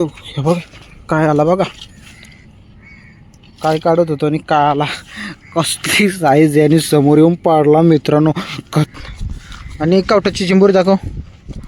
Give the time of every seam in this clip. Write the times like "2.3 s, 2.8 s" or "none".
9.0 s